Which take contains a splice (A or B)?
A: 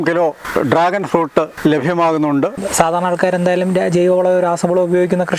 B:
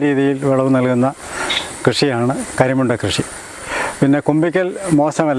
A